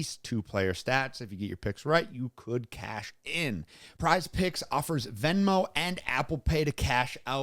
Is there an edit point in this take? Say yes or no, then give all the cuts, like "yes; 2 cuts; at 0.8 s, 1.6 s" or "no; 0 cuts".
yes; 1 cut; at 3.8 s